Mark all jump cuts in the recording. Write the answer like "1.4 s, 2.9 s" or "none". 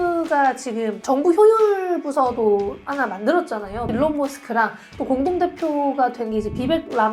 1.0 s, 3.9 s